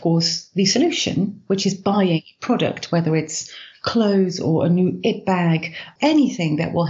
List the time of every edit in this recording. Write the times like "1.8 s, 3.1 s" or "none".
5.9 s